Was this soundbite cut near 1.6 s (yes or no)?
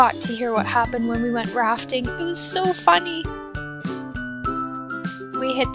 yes